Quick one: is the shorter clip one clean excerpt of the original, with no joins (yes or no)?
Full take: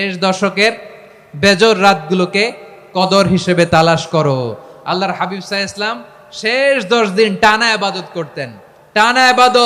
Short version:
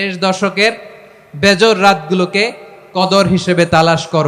yes